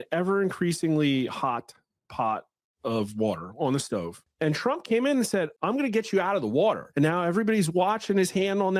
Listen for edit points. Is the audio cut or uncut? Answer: cut